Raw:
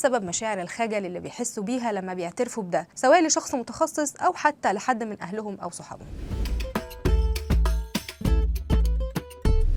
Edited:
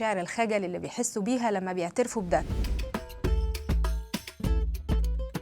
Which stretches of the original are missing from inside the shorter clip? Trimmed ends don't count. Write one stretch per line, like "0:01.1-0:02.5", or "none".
0:02.9-0:06.3